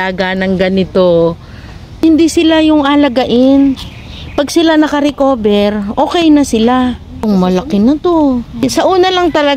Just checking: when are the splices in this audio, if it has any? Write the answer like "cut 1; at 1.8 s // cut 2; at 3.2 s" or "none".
cut 1; at 2.0 s // cut 2; at 7.2 s // cut 3; at 8.6 s

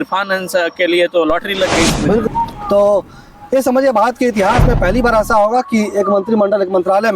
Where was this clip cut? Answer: cut 1; at 2.2 s

